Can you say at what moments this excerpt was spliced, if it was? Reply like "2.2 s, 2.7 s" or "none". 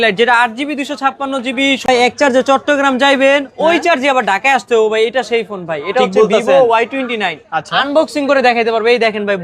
1.9 s